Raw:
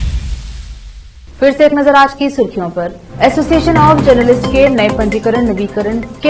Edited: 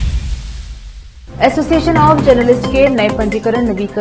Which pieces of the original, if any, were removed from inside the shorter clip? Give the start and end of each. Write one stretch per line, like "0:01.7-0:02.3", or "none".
0:01.2-0:03.0